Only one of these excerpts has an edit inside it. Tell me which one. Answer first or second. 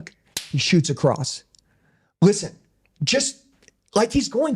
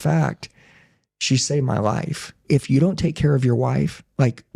second